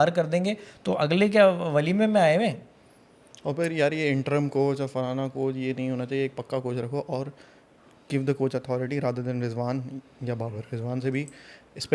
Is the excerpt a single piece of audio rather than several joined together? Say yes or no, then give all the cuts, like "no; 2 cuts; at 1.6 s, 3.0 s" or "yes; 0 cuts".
yes; 0 cuts